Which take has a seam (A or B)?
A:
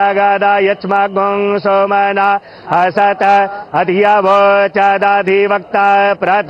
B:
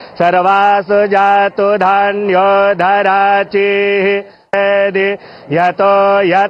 A